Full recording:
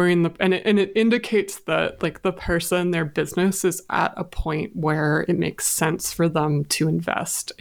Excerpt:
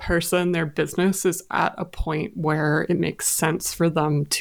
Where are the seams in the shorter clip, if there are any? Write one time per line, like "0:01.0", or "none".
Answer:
none

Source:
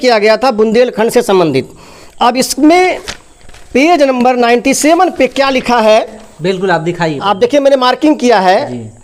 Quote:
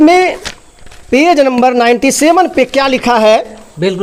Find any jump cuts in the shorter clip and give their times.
none

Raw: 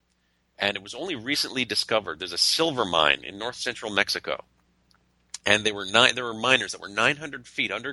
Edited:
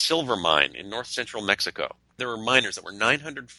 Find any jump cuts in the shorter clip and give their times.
0:02.2

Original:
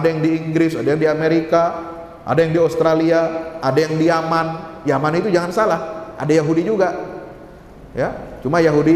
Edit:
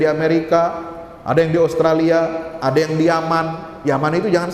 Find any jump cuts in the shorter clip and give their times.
none

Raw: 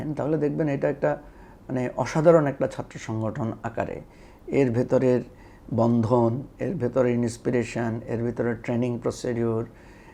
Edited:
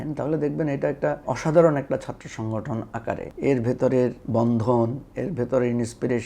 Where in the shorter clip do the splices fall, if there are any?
0:01.2
0:03.3
0:04.2

